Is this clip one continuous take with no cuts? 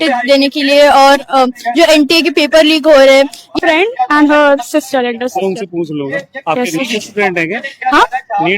no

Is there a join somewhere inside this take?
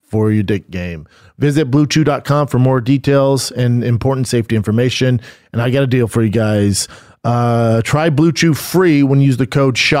yes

